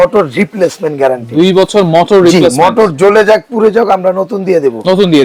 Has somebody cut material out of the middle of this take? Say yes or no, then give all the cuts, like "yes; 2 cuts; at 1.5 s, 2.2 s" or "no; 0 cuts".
no; 0 cuts